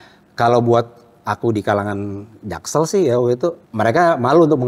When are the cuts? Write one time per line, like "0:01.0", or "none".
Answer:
0:03.6